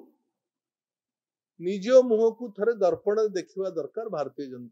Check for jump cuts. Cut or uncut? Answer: uncut